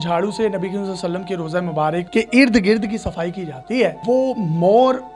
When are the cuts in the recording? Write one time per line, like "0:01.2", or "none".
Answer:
0:02.1
0:04.0